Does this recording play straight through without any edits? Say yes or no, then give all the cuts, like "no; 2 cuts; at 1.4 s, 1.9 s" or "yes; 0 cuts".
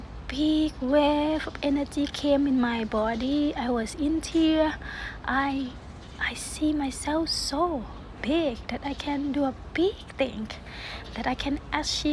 yes; 0 cuts